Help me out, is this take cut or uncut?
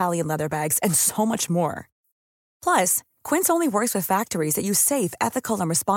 uncut